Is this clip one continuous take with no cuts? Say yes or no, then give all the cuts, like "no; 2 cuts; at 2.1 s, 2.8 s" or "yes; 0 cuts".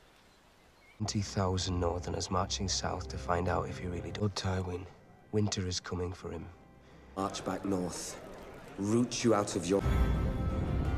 no; 2 cuts; at 7.0 s, 9.8 s